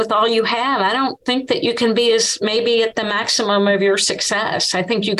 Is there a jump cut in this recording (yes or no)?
no